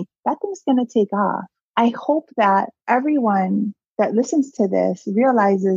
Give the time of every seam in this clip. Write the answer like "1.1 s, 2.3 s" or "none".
1.6 s, 2.7 s